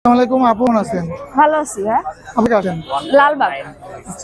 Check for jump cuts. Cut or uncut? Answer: uncut